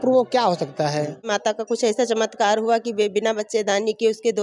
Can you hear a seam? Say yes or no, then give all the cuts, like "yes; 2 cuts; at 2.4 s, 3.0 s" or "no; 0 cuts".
yes; 1 cut; at 1.3 s